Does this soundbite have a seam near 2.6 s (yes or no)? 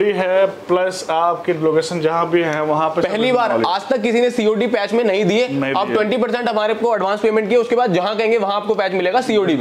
no